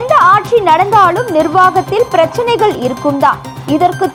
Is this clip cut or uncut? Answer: uncut